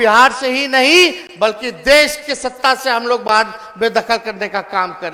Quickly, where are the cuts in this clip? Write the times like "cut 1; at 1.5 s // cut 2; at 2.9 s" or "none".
none